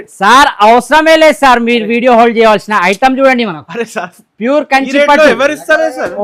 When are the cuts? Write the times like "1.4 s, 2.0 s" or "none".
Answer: none